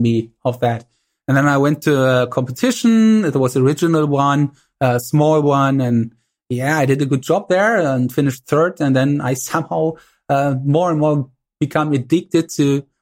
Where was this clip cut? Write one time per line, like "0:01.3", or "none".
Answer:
none